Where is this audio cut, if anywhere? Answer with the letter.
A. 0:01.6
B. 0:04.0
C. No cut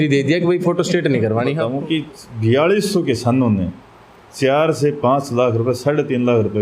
A